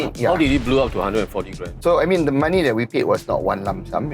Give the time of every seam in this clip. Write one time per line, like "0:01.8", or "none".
0:01.7